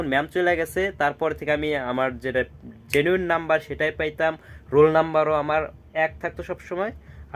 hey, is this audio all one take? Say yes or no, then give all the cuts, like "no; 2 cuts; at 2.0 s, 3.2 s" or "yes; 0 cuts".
yes; 0 cuts